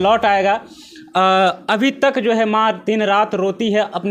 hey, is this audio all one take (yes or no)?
yes